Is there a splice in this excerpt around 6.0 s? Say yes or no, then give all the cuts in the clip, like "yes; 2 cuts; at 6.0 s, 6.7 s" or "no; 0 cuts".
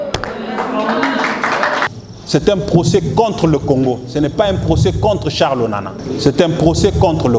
yes; 2 cuts; at 1.9 s, 6.0 s